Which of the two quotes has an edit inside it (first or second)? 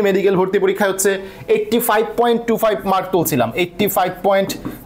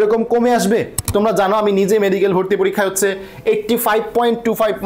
second